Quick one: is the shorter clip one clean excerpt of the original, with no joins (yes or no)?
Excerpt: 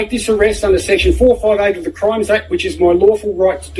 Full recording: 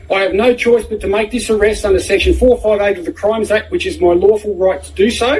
yes